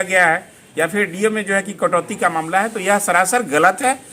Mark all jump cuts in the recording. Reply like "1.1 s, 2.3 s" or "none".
none